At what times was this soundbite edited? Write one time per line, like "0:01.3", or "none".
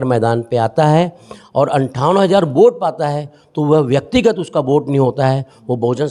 none